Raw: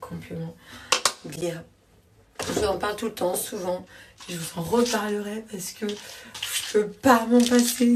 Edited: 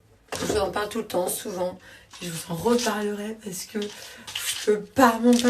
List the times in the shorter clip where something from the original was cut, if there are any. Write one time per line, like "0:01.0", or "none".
none